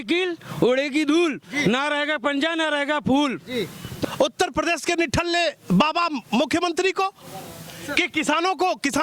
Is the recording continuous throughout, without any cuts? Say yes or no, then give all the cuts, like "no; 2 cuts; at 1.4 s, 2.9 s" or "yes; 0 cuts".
no; 1 cut; at 3.9 s